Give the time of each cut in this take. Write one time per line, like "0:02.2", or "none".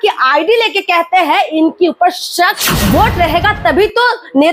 0:02.7